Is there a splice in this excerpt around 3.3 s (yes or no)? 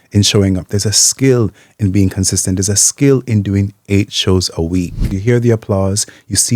no